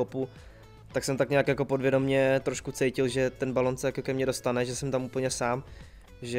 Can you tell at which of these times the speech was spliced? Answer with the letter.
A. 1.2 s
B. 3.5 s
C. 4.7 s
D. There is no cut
D